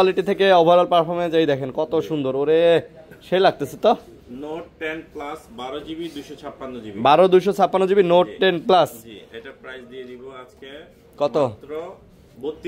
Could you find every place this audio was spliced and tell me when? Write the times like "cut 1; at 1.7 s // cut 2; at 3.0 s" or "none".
none